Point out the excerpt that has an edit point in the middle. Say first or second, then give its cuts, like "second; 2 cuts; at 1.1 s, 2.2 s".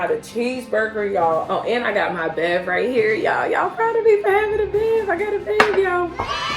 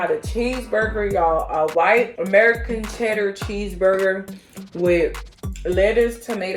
first; 1 cut; at 1.5 s